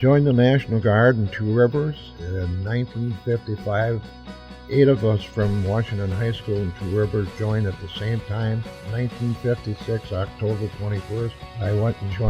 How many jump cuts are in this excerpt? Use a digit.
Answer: 1